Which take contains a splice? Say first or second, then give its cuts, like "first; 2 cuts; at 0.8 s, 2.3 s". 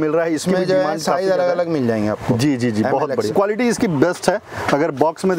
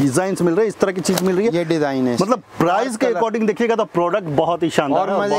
first; 1 cut; at 3.3 s